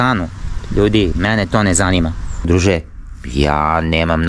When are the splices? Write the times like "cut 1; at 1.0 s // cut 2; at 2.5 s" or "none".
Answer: cut 1; at 2.5 s

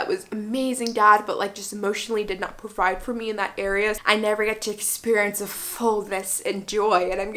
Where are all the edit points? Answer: cut 1; at 4.0 s

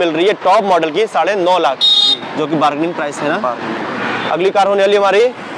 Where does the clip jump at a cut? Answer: none

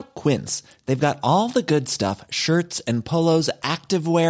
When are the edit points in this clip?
none

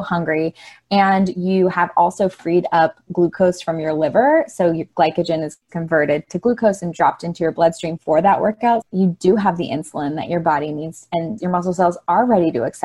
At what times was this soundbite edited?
cut 1; at 8.8 s // cut 2; at 11.4 s

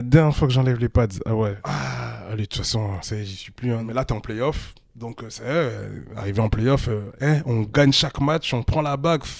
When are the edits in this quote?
cut 1; at 1.6 s // cut 2; at 3.8 s // cut 3; at 7.1 s

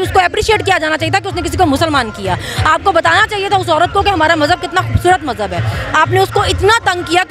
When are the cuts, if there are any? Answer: none

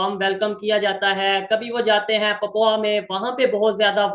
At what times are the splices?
none

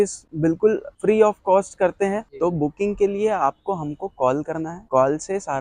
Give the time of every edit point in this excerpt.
cut 1; at 0.9 s // cut 2; at 2.3 s

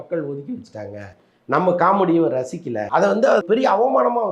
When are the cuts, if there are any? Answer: cut 1; at 2.8 s // cut 2; at 3.4 s

